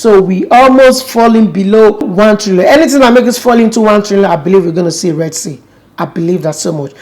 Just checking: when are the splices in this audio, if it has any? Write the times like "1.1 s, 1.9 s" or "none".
2.1 s